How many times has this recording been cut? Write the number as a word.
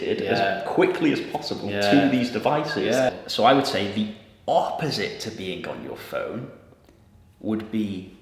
one